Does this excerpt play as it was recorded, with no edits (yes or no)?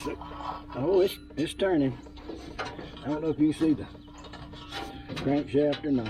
yes